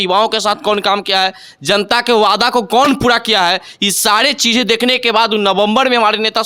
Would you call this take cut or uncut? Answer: uncut